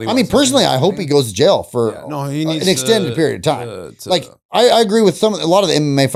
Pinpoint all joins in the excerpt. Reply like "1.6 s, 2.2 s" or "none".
none